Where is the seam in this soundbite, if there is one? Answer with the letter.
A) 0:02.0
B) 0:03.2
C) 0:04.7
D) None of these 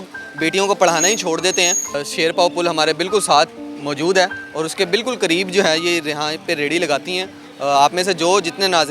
A